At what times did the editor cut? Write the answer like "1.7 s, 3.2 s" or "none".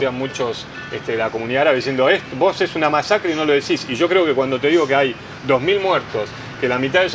none